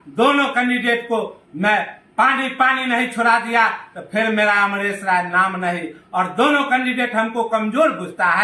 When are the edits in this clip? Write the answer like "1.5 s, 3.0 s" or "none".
none

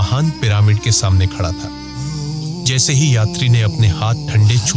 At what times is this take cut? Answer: 2.0 s

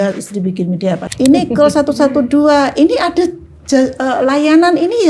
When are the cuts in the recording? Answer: 1.1 s

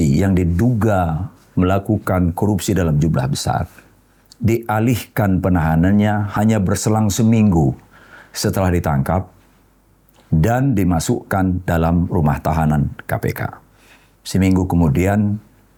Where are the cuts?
none

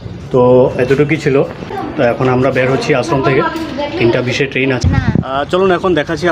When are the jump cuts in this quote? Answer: 1.8 s, 4.8 s

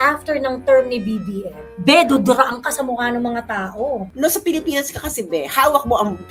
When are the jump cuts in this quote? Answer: 4.1 s

